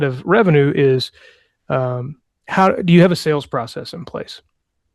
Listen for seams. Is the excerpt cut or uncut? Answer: uncut